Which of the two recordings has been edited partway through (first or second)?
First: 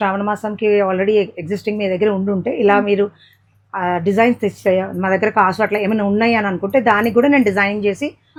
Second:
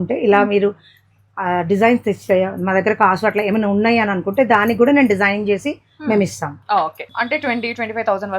second